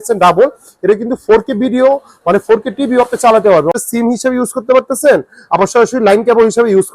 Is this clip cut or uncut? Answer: cut